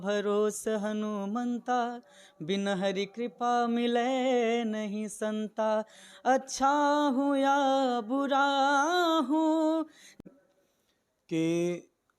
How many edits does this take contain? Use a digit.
1